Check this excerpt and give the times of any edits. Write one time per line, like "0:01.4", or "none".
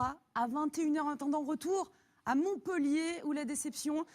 0:01.7